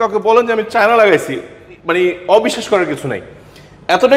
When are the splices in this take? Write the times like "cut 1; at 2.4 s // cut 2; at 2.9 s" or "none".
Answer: none